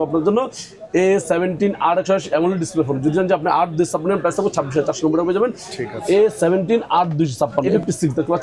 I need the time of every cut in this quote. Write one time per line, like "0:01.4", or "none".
none